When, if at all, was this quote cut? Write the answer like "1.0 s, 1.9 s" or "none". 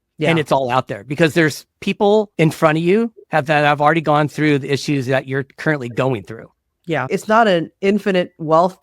2.3 s, 7.0 s

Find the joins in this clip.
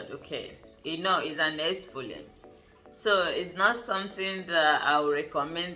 none

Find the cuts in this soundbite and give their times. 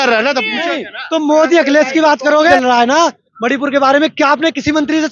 2.5 s

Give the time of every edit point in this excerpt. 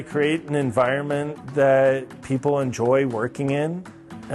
none

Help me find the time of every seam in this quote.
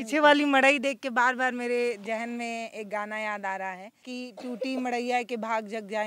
4.2 s

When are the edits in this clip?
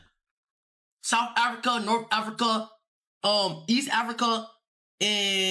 none

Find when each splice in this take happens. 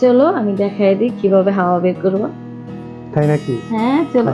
none

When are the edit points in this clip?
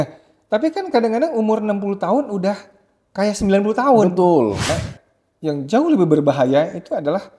4.7 s

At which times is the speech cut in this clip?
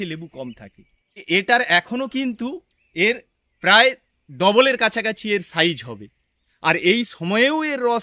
1.2 s

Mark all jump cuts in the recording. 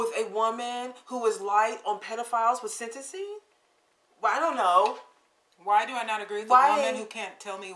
none

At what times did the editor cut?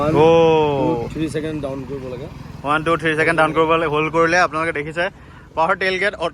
none

